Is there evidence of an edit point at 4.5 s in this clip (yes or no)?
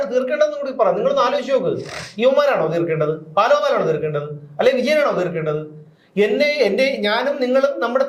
no